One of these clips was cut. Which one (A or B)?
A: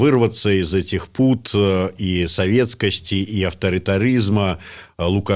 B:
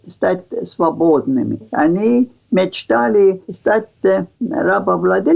B